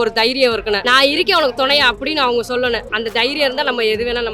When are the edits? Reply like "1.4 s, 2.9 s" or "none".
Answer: 0.8 s, 2.9 s